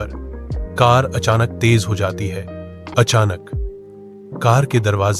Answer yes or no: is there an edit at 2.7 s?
yes